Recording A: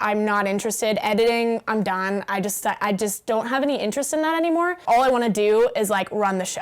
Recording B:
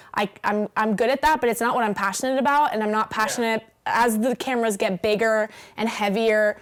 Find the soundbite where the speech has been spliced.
A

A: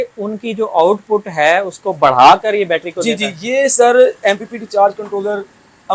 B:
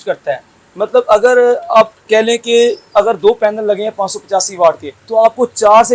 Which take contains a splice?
B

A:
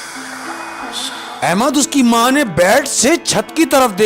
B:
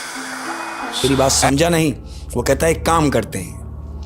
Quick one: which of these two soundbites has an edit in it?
B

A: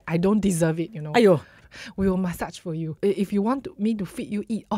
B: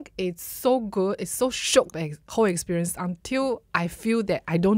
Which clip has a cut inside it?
A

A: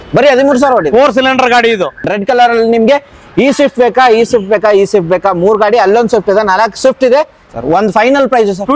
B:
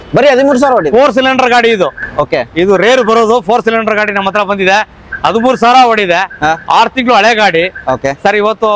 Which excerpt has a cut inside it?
A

